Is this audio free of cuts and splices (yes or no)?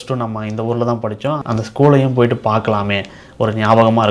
no